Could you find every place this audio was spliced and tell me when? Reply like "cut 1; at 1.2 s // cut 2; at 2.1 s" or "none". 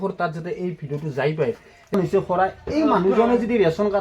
cut 1; at 1.9 s